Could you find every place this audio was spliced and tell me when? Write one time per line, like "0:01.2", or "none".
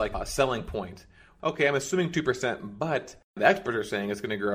0:01.2
0:03.2